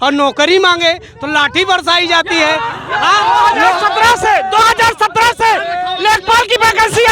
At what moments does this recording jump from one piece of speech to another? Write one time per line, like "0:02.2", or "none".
0:03.8